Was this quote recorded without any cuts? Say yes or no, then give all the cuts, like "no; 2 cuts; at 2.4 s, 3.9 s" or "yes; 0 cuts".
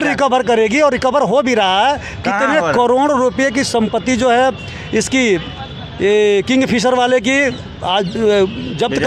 yes; 0 cuts